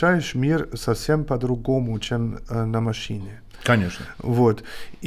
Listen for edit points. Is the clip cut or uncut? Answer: uncut